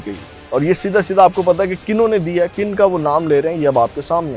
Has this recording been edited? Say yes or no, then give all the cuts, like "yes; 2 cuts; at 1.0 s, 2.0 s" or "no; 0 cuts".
no; 0 cuts